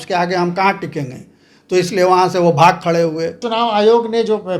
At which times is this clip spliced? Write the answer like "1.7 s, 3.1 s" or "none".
3.4 s